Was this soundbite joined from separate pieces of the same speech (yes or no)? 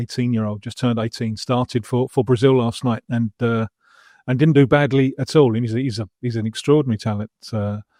no